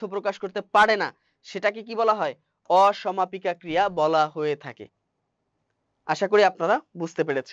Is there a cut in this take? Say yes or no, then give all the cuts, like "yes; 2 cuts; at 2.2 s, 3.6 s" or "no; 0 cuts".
no; 0 cuts